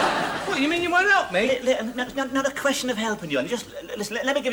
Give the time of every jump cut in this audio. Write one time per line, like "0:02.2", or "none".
none

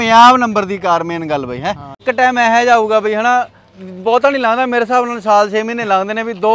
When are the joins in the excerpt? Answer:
0:02.0

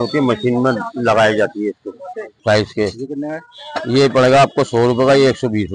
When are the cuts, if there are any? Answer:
0:02.4

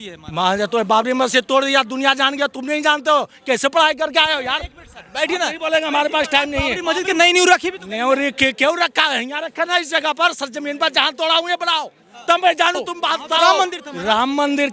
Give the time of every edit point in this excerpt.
0:06.7
0:13.5

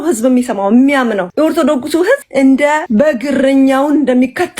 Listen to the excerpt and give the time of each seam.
0:01.3
0:02.3
0:02.8

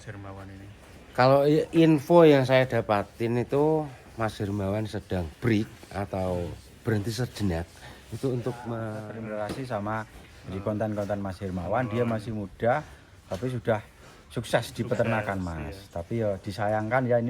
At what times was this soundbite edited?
0:09.0

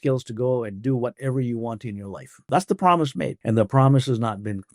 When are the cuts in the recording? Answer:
0:02.5
0:03.4

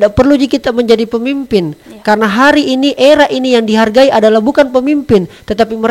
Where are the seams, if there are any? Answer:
none

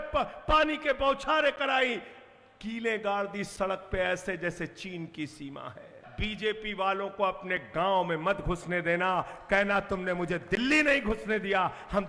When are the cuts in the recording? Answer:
0:06.0

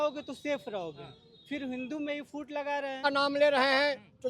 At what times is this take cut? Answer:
0:03.0

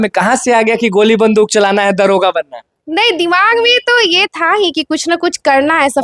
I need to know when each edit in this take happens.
none

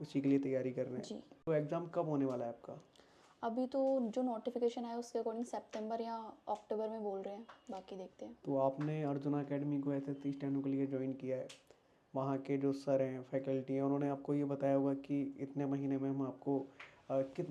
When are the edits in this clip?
none

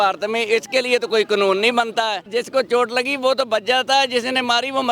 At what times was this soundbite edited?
0:02.2

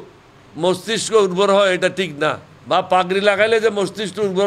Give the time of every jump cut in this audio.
0:02.5

